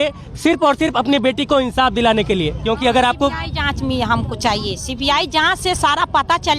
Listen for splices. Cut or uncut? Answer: cut